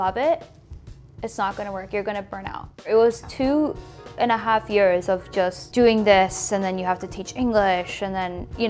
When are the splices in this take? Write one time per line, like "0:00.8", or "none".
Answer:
0:02.9
0:05.6

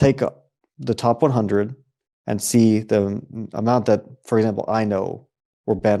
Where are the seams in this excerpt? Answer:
none

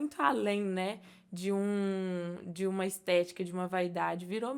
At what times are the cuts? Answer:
none

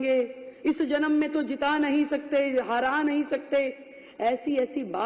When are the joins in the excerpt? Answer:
none

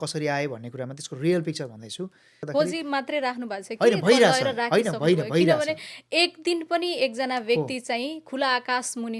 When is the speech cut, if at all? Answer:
0:02.5

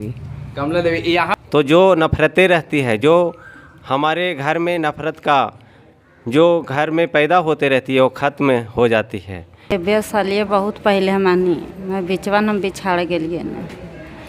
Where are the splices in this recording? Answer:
0:01.4
0:09.7

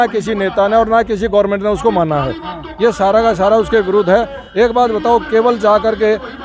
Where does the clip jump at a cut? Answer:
none

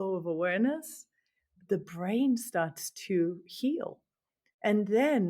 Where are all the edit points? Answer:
0:01.5

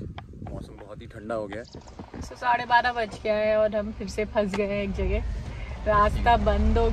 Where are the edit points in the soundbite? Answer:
0:01.8

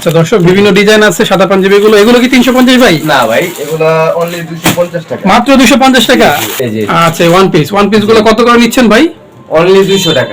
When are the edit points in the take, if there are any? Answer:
0:06.5

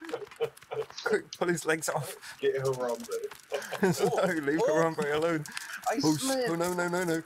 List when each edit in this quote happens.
0:02.2

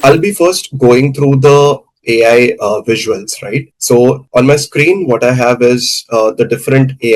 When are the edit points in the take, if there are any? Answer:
none

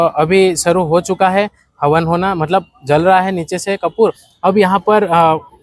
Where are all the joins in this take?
0:04.3

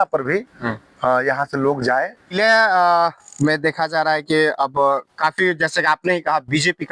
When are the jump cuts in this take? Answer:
0:02.3

